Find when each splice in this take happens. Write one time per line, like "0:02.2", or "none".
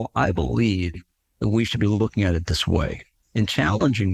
none

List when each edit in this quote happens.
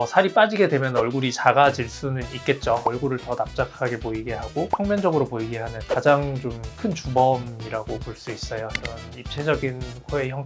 0:02.8
0:08.7

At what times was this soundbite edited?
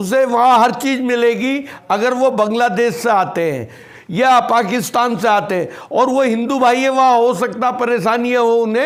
none

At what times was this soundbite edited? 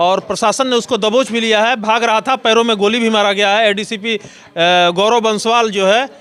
none

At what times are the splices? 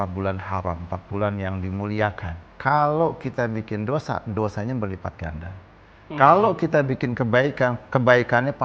0:02.5

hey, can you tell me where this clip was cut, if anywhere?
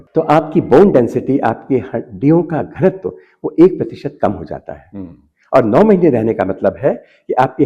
none

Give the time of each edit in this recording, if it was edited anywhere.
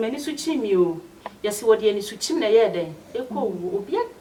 none

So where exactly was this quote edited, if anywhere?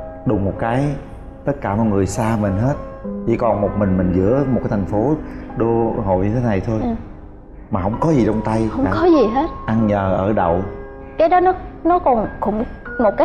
none

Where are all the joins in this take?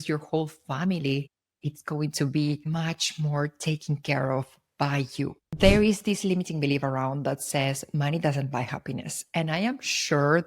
0:05.5

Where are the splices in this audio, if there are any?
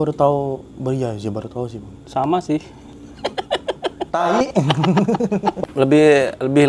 0:05.6

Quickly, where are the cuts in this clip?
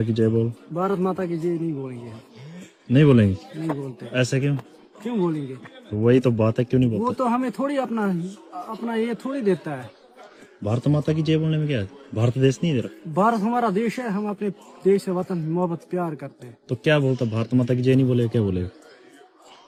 none

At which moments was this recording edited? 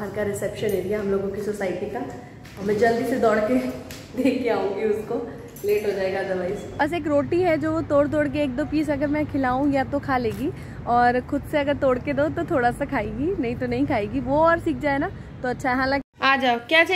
0:06.7
0:16.0

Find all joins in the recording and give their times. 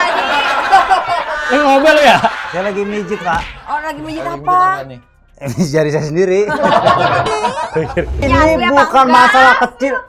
0:08.2

